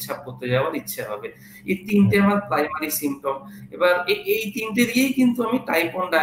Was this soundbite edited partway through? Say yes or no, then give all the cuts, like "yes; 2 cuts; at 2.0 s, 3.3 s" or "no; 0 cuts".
no; 0 cuts